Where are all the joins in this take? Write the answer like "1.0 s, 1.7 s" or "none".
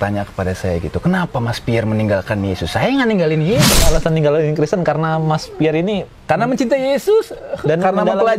3.9 s